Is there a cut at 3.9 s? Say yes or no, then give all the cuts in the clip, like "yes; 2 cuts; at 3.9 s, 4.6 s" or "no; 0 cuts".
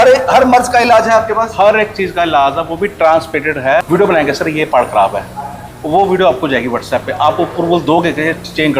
yes; 1 cut; at 3.9 s